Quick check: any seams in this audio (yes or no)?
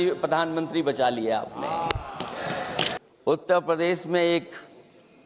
yes